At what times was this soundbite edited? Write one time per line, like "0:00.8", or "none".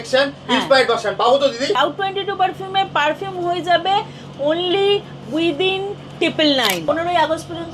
0:01.8
0:06.8